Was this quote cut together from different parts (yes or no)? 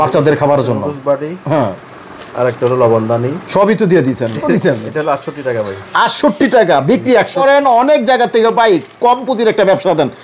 yes